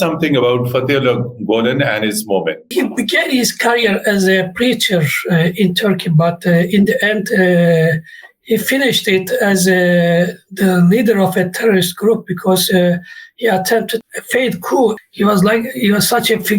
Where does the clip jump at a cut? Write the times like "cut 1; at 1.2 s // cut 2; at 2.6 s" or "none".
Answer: cut 1; at 2.6 s // cut 2; at 14.0 s // cut 3; at 14.9 s

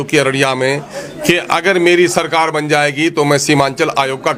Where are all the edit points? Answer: none

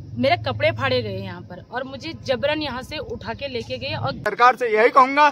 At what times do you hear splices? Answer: cut 1; at 4.2 s

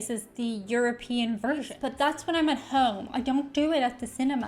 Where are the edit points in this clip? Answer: cut 1; at 1.8 s

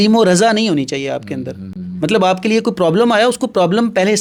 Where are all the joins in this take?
none

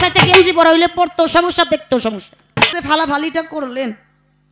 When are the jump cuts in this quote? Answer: cut 1; at 2.7 s

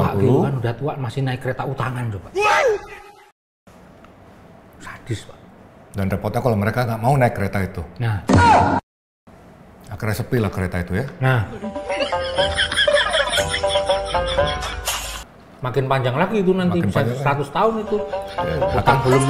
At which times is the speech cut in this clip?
none

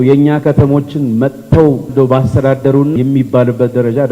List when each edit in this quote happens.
cut 1; at 1.9 s // cut 2; at 2.9 s

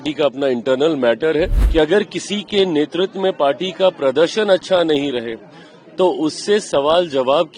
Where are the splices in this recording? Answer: cut 1; at 1.6 s

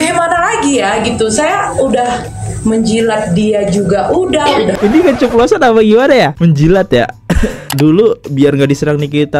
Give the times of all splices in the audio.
cut 1; at 4.7 s // cut 2; at 7.7 s

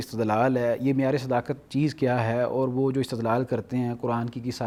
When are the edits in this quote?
none

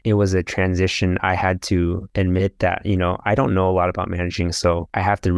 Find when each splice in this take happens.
none

